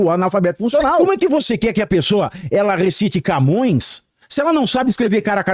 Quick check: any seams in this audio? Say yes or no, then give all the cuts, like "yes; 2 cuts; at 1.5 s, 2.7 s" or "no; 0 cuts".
yes; 1 cut; at 1.0 s